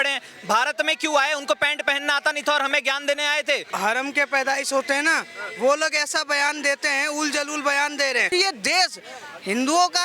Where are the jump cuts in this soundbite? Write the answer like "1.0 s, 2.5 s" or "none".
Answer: 3.7 s, 8.3 s